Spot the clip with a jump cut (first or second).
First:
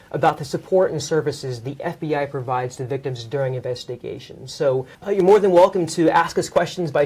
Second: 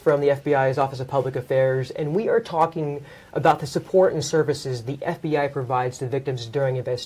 first